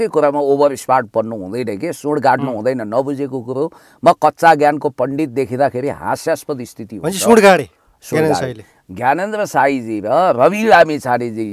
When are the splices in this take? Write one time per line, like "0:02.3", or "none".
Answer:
none